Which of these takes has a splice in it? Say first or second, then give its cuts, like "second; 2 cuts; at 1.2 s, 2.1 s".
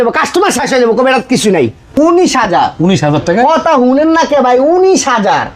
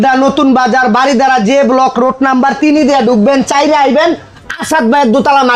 first; 1 cut; at 2.0 s